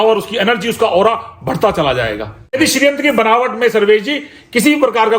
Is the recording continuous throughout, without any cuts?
no; 1 cut; at 2.6 s

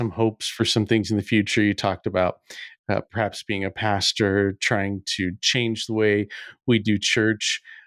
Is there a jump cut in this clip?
no; 0 cuts

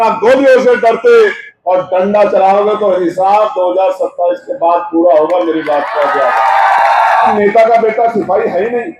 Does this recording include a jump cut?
yes; 2 cuts; at 1.5 s, 7.3 s

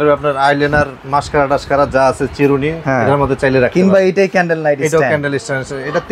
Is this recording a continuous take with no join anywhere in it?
no; 1 cut; at 2.8 s

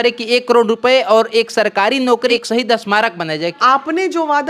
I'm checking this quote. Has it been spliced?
yes; 2 cuts; at 2.3 s, 3.5 s

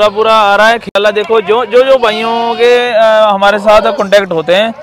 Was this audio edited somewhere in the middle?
yes; 1 cut; at 1.0 s

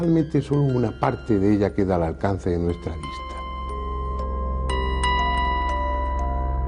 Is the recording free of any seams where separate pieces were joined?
no; 1 cut; at 4.9 s

